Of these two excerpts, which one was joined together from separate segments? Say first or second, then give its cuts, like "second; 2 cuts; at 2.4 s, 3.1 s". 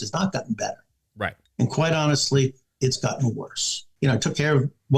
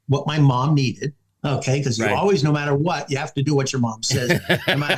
first; 2 cuts; at 1.4 s, 3.9 s